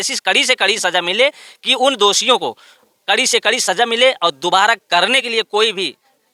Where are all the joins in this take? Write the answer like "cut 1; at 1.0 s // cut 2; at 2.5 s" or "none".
none